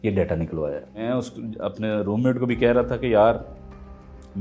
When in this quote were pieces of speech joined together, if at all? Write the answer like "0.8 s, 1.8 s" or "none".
1.0 s